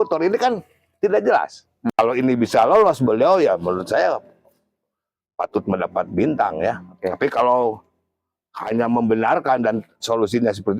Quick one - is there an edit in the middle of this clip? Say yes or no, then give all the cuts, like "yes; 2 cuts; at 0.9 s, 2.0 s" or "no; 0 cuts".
yes; 1 cut; at 1.8 s